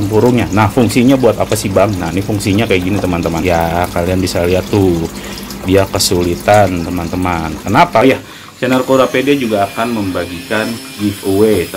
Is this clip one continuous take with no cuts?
no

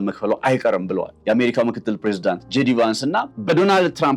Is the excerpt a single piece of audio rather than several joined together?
no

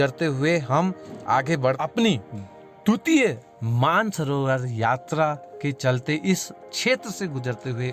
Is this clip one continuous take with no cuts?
no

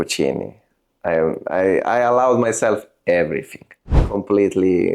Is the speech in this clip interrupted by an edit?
yes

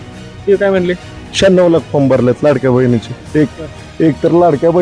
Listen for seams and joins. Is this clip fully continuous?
yes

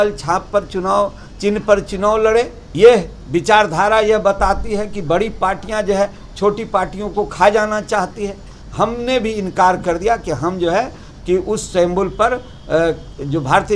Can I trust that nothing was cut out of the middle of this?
no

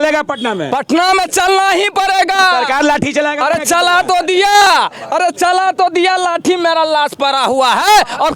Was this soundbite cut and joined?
no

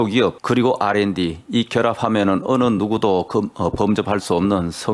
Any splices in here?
no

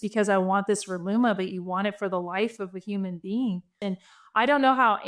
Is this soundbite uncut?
no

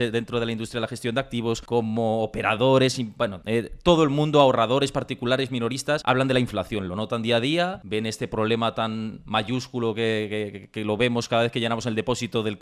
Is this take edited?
no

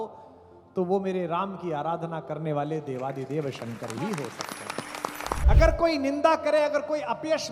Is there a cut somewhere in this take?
yes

